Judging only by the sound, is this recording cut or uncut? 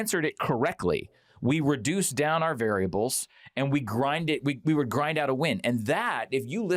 uncut